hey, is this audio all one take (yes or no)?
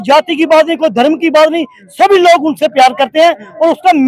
yes